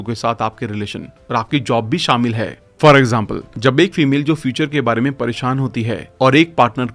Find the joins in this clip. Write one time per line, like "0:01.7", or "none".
none